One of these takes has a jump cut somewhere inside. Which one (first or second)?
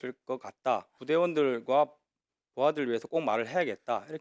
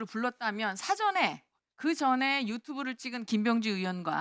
first